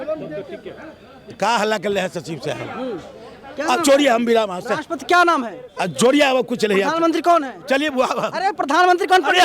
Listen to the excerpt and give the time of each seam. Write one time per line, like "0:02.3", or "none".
none